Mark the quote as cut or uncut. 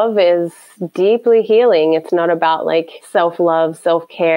cut